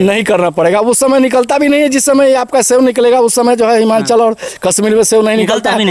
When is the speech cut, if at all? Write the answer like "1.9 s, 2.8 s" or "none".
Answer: none